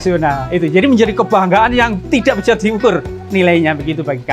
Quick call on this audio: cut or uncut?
uncut